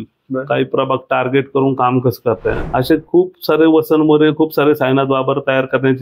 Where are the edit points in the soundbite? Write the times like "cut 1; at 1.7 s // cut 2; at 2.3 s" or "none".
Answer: cut 1; at 2.6 s